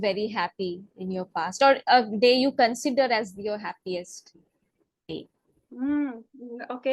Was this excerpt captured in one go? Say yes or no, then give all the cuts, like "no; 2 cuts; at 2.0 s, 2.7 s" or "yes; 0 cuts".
yes; 0 cuts